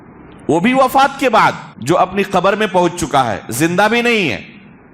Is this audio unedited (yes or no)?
no